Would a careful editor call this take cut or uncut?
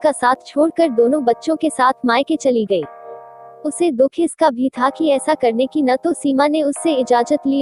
uncut